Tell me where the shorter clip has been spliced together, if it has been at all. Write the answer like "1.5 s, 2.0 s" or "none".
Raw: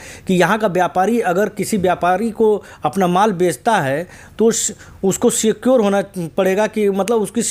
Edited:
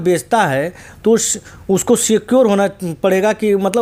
none

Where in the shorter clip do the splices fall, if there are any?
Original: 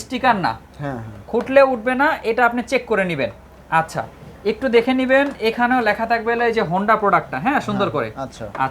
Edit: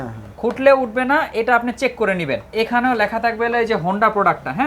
2.5 s

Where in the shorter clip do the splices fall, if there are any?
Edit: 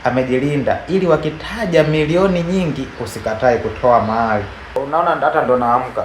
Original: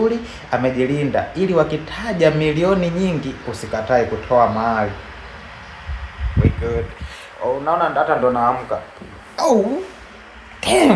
4.8 s

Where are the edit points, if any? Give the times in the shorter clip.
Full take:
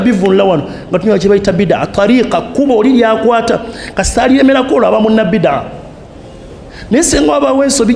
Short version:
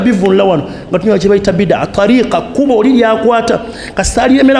none

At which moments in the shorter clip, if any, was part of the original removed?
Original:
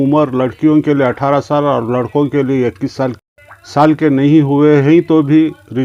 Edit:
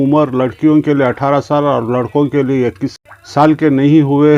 2.9 s

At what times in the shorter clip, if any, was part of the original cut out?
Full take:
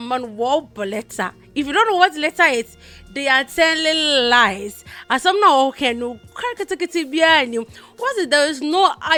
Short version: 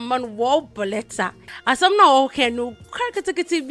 1.4 s

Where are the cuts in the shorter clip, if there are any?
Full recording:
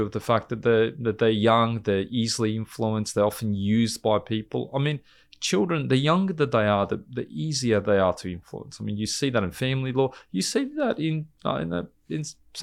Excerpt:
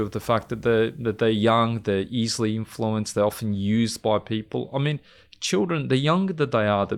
none

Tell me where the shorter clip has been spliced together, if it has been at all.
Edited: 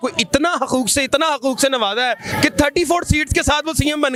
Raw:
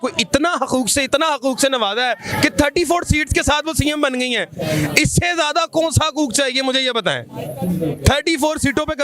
none

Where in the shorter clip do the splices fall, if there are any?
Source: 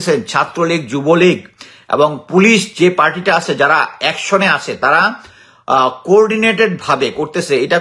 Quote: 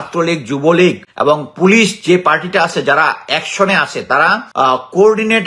1.1 s, 4.4 s

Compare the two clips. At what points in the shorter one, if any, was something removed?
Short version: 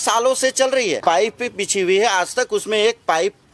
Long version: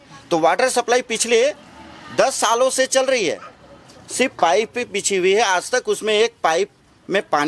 1.0 s

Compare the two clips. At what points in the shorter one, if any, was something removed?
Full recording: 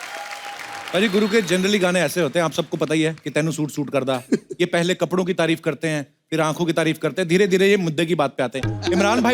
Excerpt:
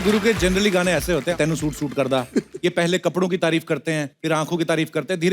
1.3 s, 4.1 s

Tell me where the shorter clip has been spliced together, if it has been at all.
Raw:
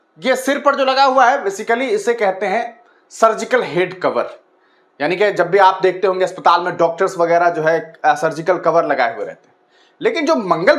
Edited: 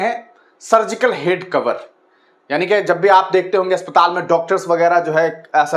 none

